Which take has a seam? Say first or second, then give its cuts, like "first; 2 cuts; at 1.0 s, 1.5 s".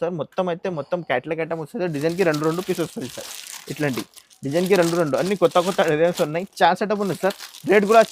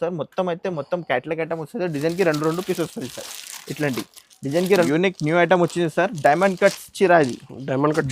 second; 1 cut; at 4.9 s